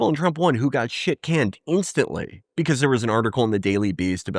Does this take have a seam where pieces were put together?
no; 0 cuts

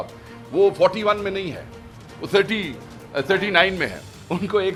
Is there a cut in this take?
no; 0 cuts

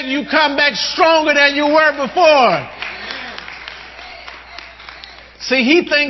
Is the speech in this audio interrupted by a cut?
no; 0 cuts

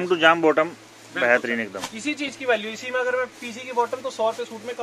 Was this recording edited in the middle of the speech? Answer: no; 0 cuts

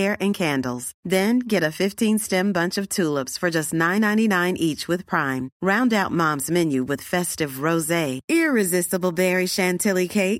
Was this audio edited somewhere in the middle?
no; 0 cuts

